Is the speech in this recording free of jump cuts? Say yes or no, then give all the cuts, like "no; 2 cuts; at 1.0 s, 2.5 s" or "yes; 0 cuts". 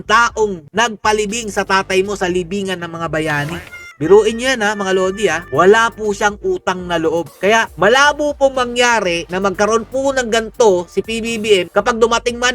yes; 0 cuts